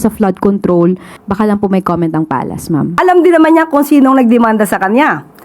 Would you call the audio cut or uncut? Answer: cut